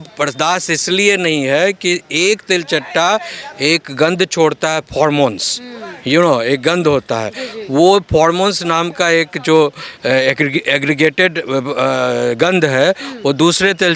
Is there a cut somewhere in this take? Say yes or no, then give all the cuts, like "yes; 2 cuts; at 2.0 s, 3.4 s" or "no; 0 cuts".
no; 0 cuts